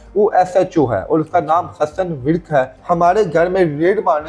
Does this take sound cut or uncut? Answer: cut